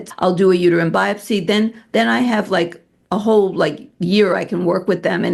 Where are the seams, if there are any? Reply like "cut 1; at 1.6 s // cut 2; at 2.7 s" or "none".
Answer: none